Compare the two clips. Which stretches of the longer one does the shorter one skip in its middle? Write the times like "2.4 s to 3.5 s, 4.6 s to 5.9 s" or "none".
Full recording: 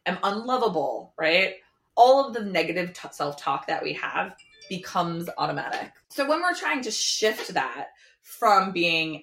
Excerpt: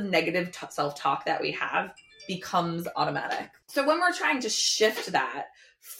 none